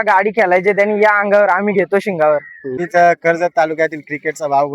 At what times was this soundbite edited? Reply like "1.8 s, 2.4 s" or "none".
2.6 s